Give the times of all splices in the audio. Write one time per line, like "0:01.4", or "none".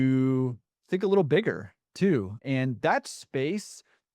0:02.4